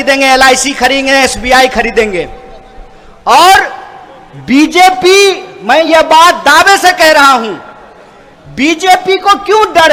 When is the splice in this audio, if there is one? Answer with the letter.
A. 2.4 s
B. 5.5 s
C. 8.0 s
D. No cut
D